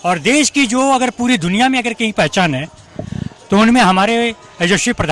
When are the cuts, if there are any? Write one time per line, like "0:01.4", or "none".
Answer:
none